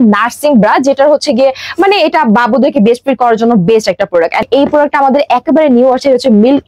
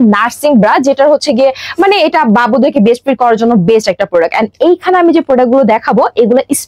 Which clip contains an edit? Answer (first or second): first